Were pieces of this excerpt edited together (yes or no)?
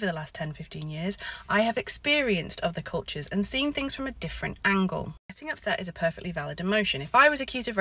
no